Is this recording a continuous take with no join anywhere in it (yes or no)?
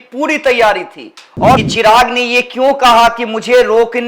no